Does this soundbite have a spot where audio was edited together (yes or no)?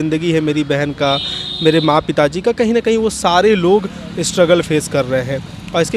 no